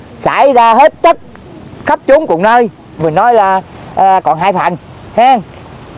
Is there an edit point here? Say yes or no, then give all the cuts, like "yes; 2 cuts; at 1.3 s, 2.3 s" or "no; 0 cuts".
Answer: yes; 1 cut; at 3.0 s